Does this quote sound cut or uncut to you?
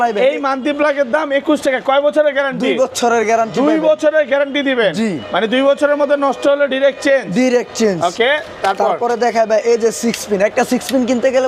uncut